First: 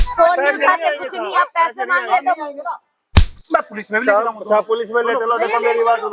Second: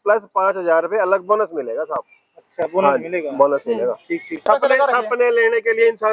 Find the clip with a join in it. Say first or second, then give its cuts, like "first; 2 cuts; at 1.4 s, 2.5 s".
second; 1 cut; at 4.5 s